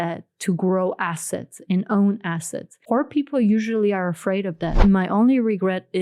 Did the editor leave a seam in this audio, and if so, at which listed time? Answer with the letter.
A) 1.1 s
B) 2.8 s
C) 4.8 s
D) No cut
C